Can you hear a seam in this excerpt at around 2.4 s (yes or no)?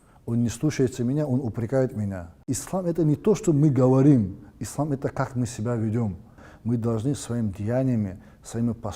yes